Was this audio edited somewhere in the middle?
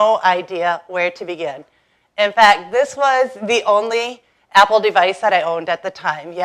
no; 0 cuts

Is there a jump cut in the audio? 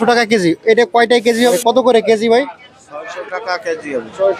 yes; 1 cut; at 1.5 s

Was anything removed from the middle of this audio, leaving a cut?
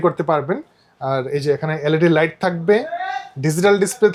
no; 0 cuts

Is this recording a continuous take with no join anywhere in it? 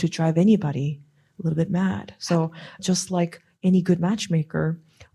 no; 2 cuts; at 1.1 s, 2.8 s

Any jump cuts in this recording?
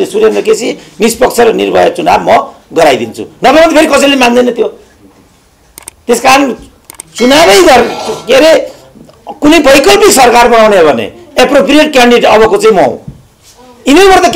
no; 0 cuts

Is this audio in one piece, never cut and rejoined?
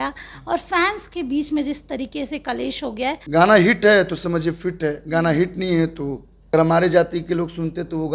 no; 2 cuts; at 3.2 s, 6.3 s

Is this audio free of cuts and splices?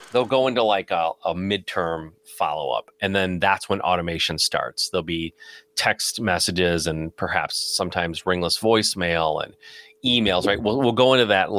yes; 0 cuts

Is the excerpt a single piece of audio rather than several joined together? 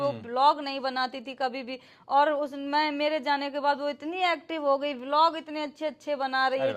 yes; 0 cuts

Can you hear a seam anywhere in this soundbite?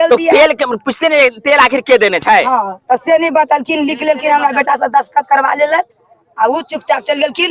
no; 0 cuts

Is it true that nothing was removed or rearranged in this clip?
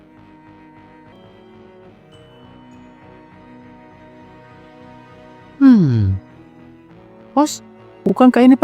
no; 1 cut; at 1.1 s

